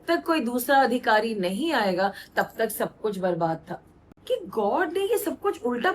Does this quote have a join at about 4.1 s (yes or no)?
yes